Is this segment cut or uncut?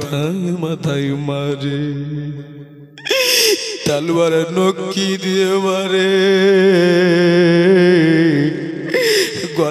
uncut